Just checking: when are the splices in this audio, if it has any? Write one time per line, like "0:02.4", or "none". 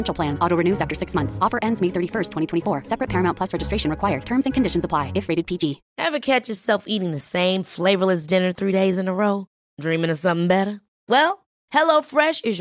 0:05.9